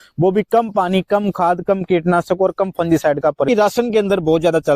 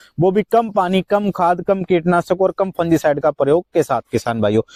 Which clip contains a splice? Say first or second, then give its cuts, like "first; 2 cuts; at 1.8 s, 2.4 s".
first; 1 cut; at 3.5 s